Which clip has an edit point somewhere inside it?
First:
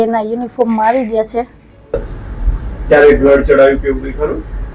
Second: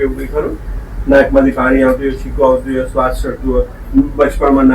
first; 1 cut; at 1.9 s

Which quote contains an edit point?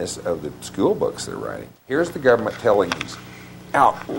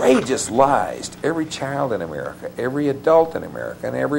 first; 1 cut; at 1.7 s

